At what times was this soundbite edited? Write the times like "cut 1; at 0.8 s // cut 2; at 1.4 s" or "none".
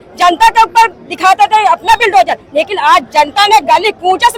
none